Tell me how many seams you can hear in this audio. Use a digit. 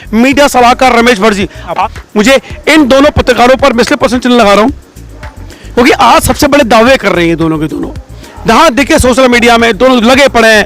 1